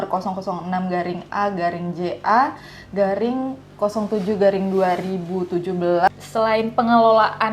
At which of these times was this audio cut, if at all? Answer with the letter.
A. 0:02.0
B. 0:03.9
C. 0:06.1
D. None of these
C